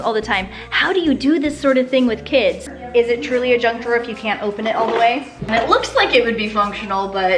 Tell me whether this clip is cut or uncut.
cut